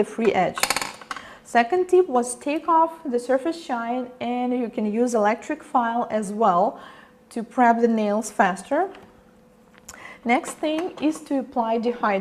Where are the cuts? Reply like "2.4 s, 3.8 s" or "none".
10.9 s